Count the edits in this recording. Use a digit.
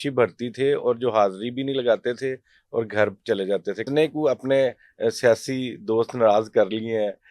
1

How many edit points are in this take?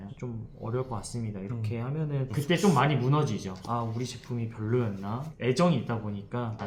0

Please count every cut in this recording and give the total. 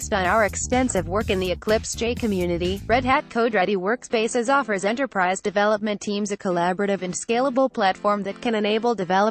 0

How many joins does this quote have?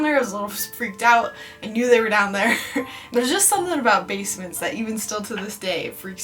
0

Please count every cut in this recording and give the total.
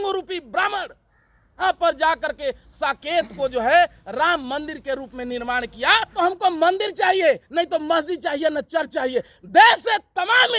2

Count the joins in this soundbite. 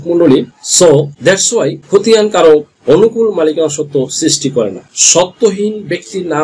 1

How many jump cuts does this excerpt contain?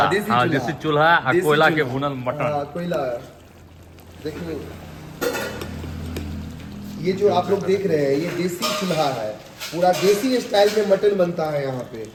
0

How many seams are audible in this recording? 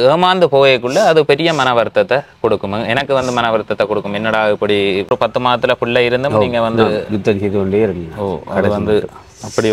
1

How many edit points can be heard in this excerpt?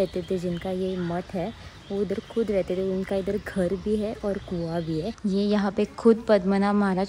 1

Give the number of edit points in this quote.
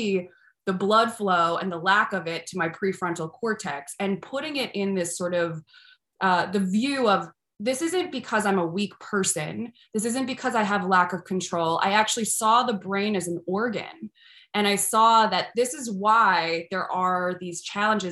0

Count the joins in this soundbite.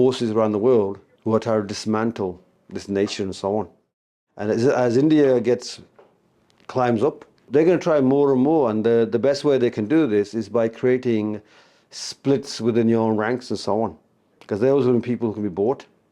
2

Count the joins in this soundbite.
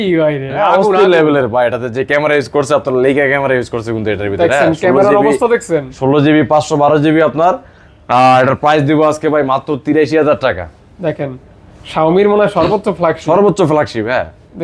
0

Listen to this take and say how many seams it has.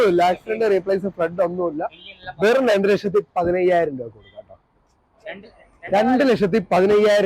0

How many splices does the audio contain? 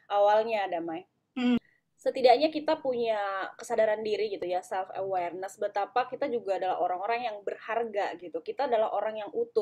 1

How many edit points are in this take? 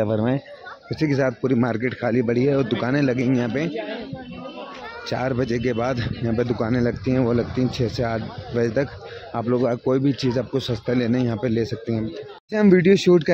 0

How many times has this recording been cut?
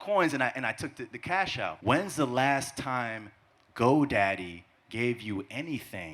1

